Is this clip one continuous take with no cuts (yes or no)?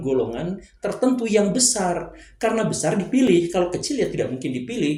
yes